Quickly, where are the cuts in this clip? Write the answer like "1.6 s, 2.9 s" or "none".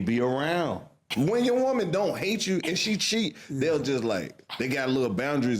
1.0 s